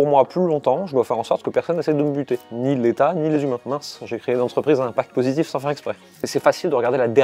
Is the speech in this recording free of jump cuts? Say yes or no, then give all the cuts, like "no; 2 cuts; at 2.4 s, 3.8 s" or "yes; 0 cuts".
no; 2 cuts; at 3.6 s, 6.1 s